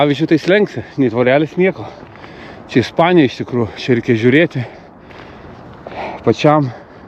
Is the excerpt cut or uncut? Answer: uncut